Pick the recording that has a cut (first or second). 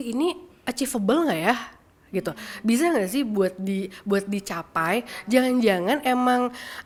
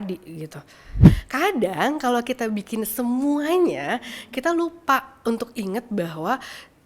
second